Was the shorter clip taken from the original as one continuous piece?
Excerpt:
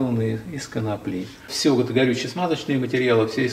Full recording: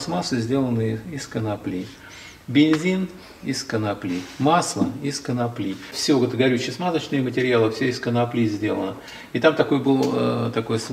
no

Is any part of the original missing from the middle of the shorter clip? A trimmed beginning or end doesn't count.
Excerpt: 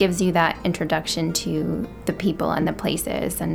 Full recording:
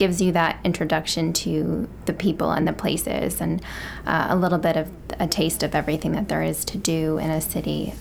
no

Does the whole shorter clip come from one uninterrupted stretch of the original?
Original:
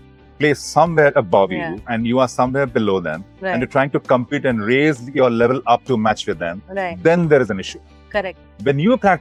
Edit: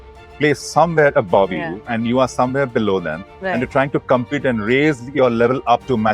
yes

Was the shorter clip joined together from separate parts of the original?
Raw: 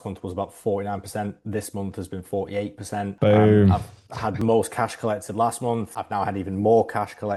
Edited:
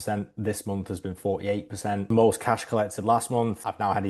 yes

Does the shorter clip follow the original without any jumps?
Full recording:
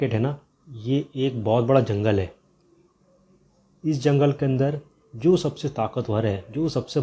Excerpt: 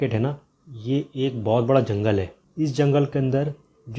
no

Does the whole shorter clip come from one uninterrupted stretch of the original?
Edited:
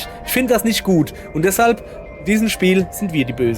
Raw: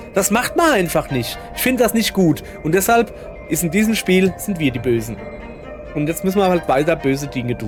no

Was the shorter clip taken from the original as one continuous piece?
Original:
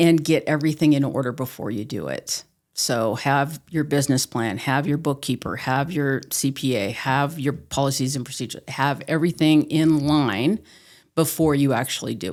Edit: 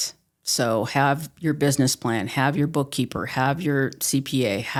yes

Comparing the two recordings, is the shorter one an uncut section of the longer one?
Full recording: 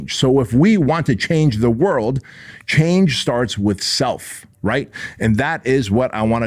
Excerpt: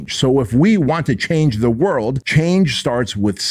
no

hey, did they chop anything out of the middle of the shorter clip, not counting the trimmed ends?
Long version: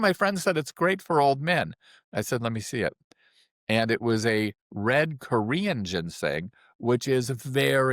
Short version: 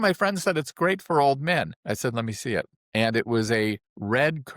yes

